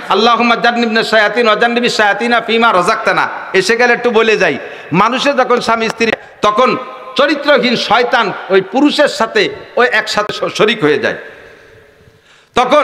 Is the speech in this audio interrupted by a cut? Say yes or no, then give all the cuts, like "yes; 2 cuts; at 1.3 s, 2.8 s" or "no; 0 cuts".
yes; 2 cuts; at 6.1 s, 10.3 s